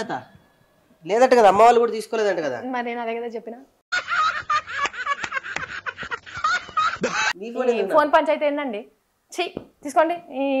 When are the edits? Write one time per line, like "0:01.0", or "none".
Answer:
0:07.3